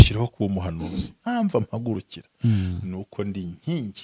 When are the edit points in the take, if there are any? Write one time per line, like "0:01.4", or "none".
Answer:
0:01.2